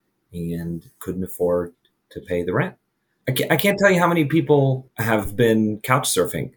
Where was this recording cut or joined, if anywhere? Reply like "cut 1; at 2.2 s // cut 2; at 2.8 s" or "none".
cut 1; at 3.2 s // cut 2; at 4.9 s